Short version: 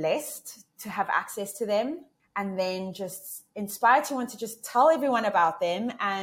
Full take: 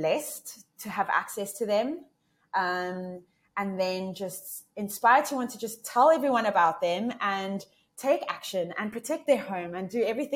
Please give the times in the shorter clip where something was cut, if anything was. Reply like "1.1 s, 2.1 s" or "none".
2.2 s